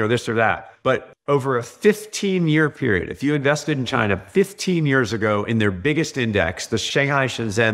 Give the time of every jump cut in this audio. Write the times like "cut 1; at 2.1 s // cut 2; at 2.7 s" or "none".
cut 1; at 0.8 s // cut 2; at 6.8 s